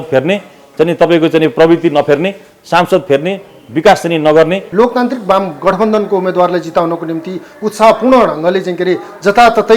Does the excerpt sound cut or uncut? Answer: uncut